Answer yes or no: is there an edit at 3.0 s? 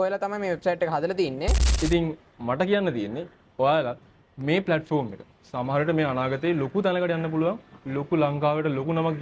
no